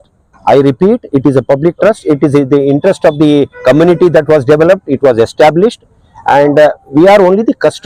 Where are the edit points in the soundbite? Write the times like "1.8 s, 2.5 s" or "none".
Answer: none